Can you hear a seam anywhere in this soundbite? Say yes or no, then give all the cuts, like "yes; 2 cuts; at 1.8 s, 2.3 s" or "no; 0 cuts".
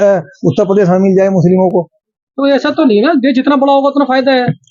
no; 0 cuts